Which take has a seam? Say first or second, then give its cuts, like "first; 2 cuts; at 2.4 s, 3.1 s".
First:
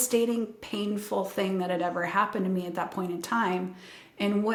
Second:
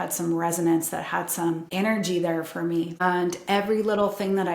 second; 2 cuts; at 1.7 s, 3.0 s